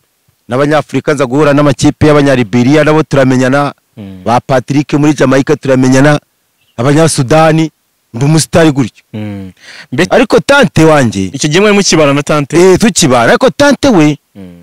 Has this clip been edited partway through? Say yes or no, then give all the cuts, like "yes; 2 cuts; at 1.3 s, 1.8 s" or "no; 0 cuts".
yes; 1 cut; at 10.1 s